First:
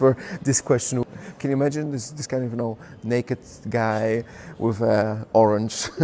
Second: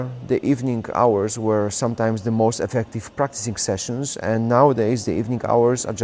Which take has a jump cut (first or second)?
first